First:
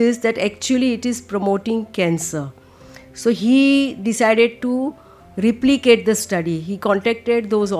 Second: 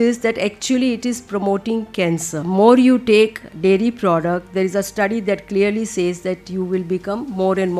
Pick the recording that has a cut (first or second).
second